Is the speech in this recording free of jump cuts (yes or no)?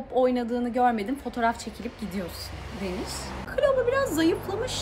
no